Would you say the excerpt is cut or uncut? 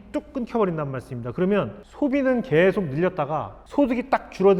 uncut